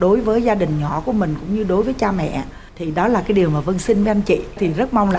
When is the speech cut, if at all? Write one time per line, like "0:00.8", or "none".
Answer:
none